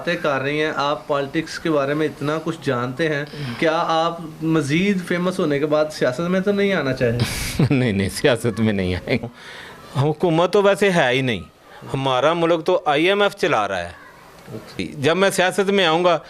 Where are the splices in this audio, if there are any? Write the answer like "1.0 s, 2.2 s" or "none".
9.2 s, 14.9 s